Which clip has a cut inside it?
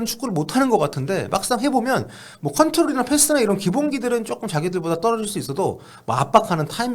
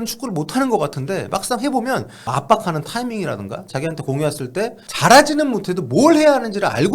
second; 2 cuts; at 2.2 s, 4.9 s

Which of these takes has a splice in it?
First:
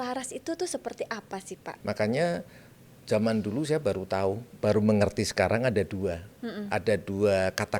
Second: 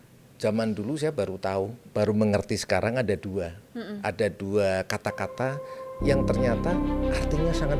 first; 1 cut; at 1.7 s

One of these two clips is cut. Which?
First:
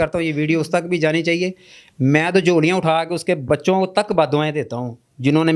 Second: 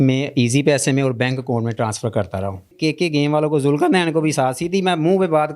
second; 1 cut; at 2.7 s

